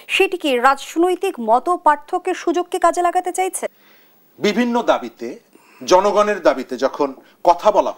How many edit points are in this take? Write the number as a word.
one